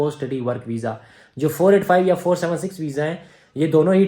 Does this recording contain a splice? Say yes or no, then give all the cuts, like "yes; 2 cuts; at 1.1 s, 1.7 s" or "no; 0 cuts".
no; 0 cuts